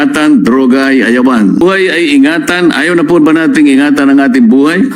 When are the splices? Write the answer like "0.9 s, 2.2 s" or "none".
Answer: 1.6 s